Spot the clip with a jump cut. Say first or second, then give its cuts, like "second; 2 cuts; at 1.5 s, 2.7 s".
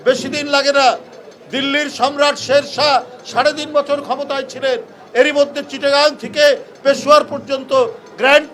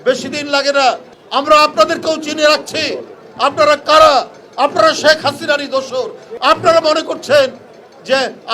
second; 2 cuts; at 1.1 s, 6.2 s